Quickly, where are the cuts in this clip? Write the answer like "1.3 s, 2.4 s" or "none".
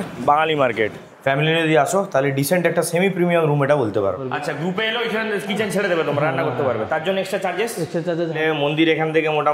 1.0 s, 4.2 s, 8.4 s